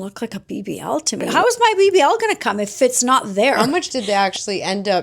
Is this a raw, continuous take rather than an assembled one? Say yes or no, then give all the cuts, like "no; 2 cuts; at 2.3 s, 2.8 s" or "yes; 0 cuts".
no; 2 cuts; at 1.3 s, 3.6 s